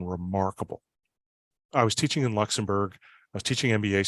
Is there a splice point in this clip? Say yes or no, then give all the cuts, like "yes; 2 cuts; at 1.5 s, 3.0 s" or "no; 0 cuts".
yes; 1 cut; at 1.5 s